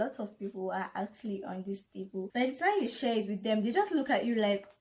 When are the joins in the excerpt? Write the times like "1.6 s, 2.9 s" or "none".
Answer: 2.2 s